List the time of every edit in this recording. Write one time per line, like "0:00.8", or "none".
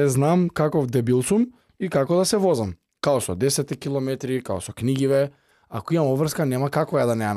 none